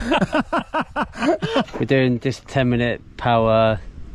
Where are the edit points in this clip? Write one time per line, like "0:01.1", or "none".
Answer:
0:01.7

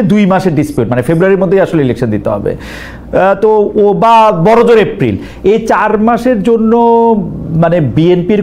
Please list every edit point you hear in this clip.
none

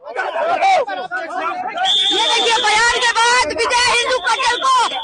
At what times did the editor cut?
none

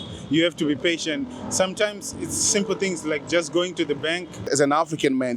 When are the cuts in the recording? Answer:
0:04.4

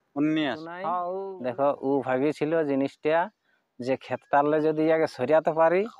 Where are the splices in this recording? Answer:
0:01.1

